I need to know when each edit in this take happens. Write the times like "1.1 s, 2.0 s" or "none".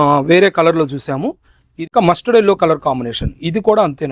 1.9 s